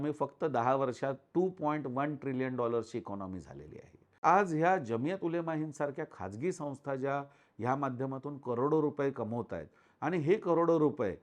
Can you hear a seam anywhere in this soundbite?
yes; 1 cut; at 4.2 s

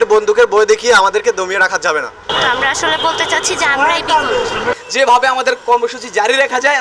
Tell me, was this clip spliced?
yes; 2 cuts; at 2.2 s, 4.8 s

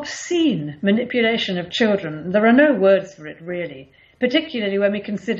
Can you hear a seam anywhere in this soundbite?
no; 0 cuts

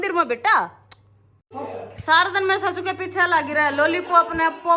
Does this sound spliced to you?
yes; 1 cut; at 1.4 s

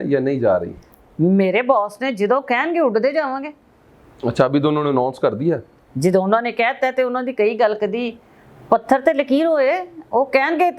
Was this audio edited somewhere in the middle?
no; 0 cuts

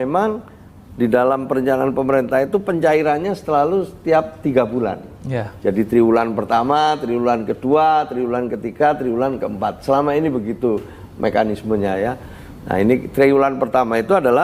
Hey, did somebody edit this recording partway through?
no; 0 cuts

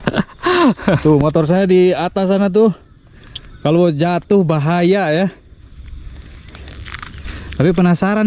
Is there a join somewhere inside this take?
yes; 2 cuts; at 1.0 s, 7.3 s

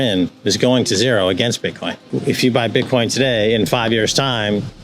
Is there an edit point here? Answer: yes; 1 cut; at 2.1 s

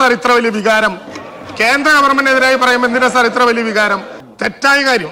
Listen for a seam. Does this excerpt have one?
yes; 1 cut; at 4.2 s

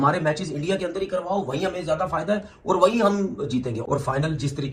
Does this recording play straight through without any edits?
yes; 0 cuts

